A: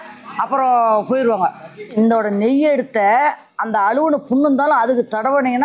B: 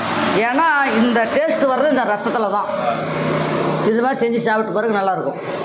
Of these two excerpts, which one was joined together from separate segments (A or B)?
A